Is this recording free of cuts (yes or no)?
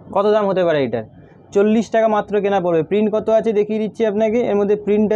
yes